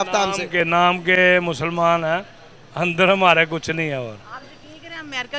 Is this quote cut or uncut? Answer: uncut